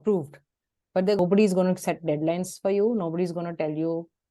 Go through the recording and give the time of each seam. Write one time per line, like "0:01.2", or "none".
0:01.2

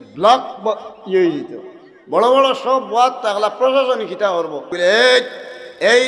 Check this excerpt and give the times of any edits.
0:04.7

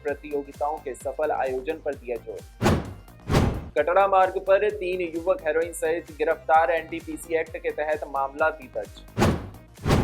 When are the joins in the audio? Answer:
0:02.4
0:03.6

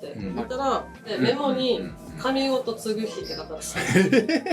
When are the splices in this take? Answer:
0:01.2

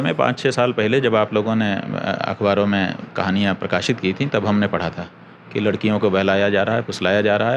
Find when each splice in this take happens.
none

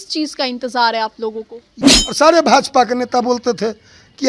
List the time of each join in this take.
0:01.8

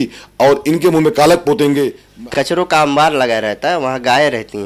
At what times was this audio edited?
0:02.0

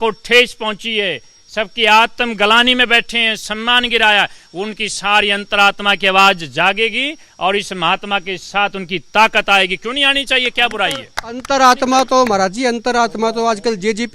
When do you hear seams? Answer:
none

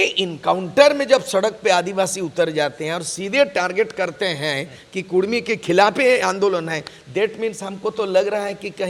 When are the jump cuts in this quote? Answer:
none

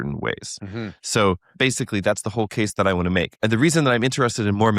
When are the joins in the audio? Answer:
0:01.5
0:03.3

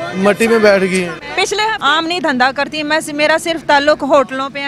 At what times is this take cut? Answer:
0:01.7

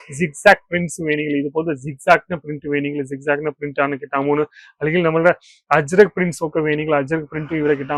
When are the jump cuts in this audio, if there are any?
none

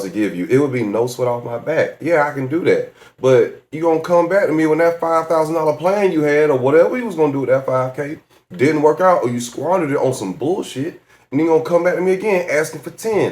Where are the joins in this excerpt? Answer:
none

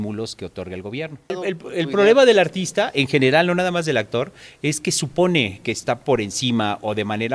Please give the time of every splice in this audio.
0:01.4

